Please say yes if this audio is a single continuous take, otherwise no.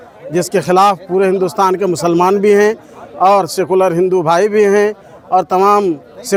yes